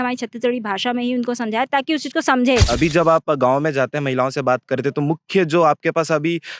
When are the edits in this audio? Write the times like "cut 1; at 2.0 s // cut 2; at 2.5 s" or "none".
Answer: cut 1; at 2.7 s